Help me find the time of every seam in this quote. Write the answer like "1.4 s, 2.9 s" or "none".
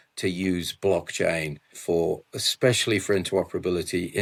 none